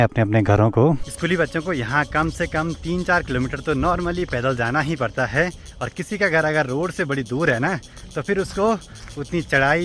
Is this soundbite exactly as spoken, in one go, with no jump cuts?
yes; 0 cuts

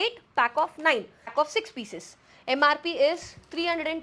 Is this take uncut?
no; 1 cut; at 1.3 s

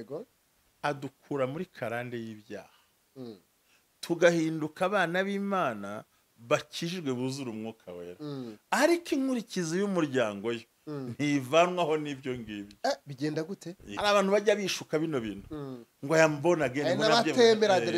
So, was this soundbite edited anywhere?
yes; 1 cut; at 13.9 s

